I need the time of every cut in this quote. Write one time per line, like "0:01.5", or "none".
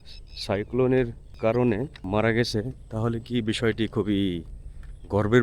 0:01.3
0:02.0